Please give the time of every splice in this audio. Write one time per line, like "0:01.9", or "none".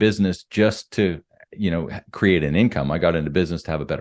none